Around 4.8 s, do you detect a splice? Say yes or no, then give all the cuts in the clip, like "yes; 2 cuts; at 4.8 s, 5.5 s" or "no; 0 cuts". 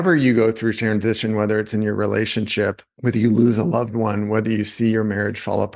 no; 1 cut; at 2.9 s